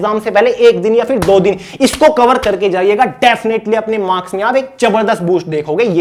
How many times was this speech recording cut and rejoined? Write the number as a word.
zero